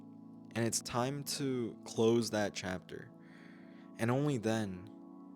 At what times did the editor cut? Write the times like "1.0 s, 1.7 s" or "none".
1.8 s

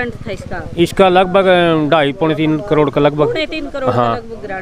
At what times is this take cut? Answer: none

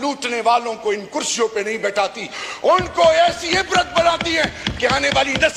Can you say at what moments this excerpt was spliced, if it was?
none

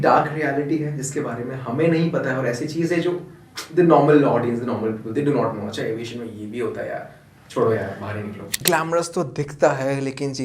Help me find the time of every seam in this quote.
8.6 s

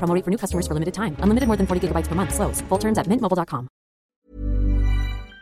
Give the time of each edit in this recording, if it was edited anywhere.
4.1 s

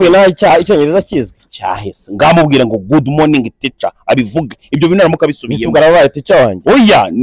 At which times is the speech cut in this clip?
none

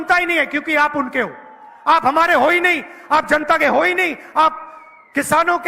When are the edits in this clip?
none

